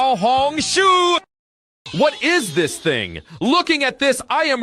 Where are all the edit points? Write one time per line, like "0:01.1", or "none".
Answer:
0:01.6